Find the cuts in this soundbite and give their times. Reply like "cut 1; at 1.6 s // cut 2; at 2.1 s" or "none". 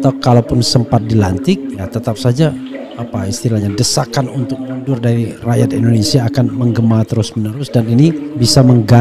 none